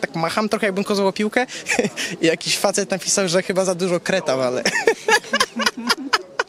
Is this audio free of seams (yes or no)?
yes